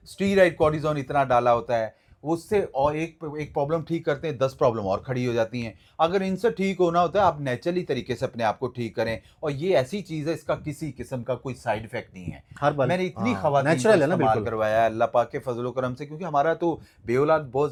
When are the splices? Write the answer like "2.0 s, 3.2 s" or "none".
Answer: none